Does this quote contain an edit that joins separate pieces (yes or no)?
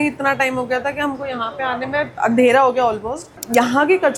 no